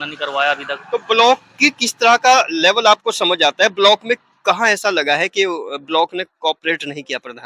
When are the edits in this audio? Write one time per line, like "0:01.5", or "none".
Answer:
none

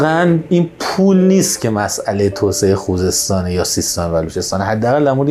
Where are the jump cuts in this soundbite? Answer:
none

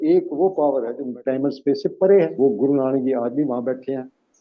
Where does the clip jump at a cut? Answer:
0:01.1
0:02.4

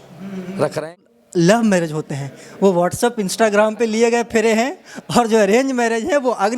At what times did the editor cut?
0:01.1

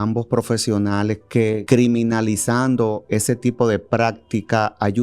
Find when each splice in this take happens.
0:01.6

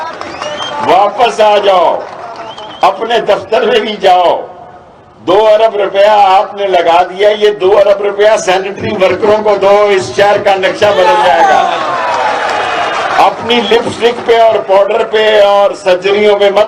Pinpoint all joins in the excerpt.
none

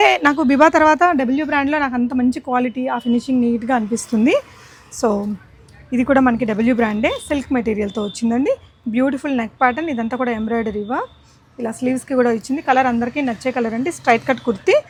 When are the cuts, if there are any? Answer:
none

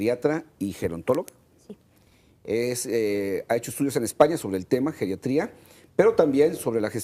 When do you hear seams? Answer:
0:03.1

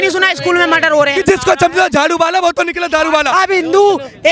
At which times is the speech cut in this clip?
0:01.1
0:03.3

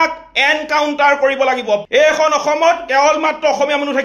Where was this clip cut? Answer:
0:01.9

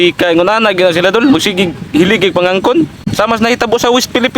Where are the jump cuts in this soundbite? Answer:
0:03.0

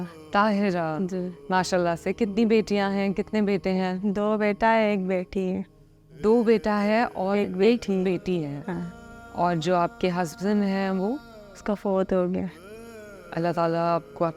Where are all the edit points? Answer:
0:01.4

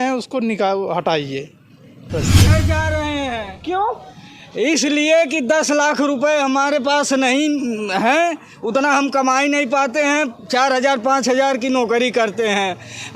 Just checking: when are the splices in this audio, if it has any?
0:02.4

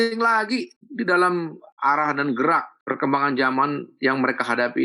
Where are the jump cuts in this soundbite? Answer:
0:01.6

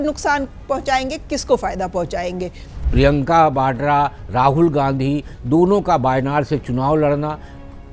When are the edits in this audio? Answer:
0:02.8

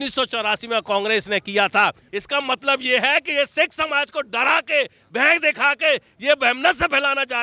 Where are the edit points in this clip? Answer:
0:02.0

